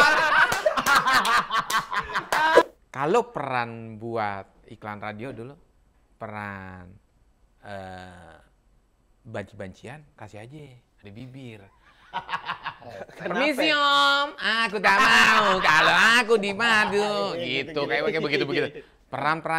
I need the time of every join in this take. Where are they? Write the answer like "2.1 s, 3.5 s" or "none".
2.6 s

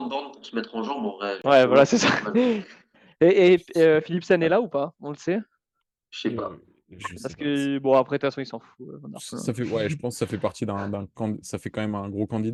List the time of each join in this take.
none

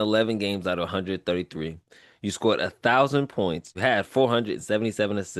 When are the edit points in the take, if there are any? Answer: 3.7 s

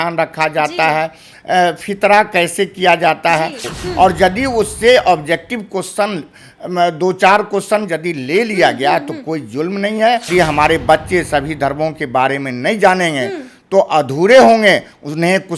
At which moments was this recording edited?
3.7 s, 10.3 s

